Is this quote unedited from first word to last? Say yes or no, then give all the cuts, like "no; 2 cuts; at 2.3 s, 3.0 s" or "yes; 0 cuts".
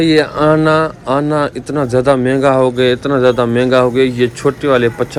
yes; 0 cuts